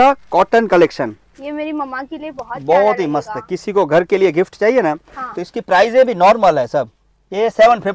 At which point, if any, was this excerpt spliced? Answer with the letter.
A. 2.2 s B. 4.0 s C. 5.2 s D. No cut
D